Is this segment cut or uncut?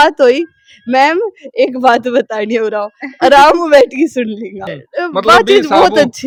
uncut